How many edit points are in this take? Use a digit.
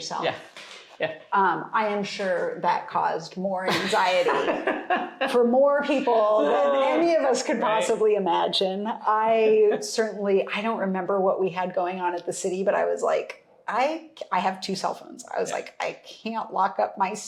0